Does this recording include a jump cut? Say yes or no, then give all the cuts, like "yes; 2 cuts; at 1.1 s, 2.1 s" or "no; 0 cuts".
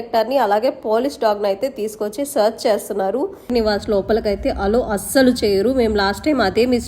yes; 1 cut; at 3.5 s